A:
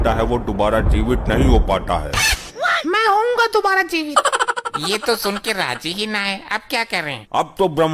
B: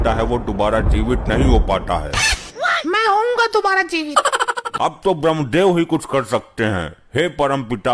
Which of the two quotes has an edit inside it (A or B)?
B